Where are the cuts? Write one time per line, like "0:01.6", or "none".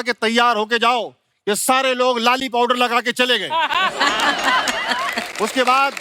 none